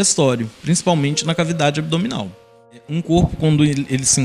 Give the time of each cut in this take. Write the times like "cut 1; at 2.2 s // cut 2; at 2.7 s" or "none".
cut 1; at 2.8 s

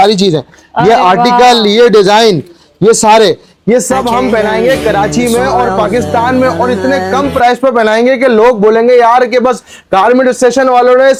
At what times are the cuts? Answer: none

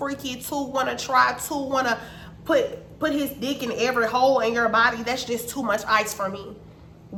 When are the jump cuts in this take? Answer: none

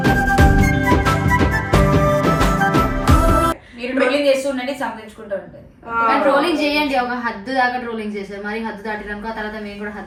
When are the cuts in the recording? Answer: none

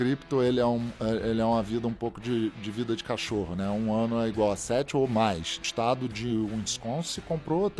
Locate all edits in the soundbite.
cut 1; at 5.6 s

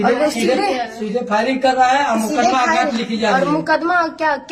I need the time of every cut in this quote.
none

